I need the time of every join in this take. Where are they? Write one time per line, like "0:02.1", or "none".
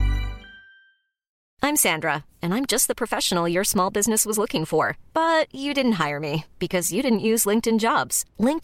0:01.4